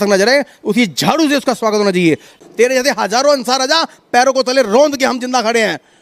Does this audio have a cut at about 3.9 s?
no; 1 cut; at 2.3 s

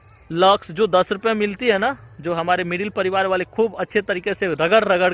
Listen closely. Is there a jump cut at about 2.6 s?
no; 0 cuts

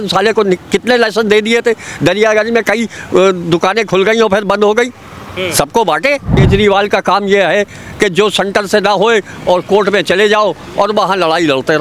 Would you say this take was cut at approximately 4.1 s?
no; 1 cut; at 6.4 s

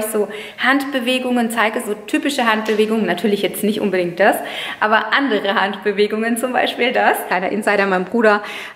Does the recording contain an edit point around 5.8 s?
no; 1 cut; at 7.3 s

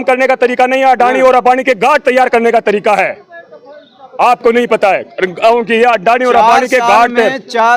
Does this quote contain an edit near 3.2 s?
no; 0 cuts

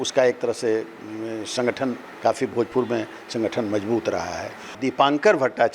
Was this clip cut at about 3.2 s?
no; 1 cut; at 4.8 s

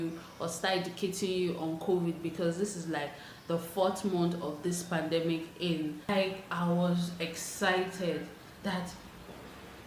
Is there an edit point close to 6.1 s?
yes; 1 cut; at 6.1 s

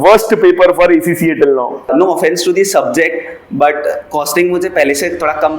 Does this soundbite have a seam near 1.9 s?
yes; 1 cut; at 1.9 s

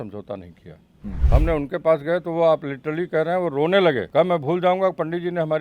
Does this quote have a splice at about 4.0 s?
yes; 2 cuts; at 1.2 s, 4.0 s

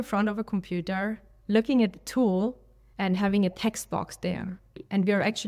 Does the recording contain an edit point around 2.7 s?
no; 0 cuts

